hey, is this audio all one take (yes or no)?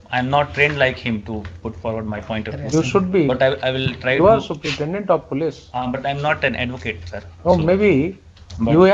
yes